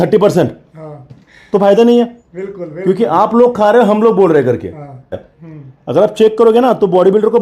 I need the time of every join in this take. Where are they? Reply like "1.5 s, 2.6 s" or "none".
5.2 s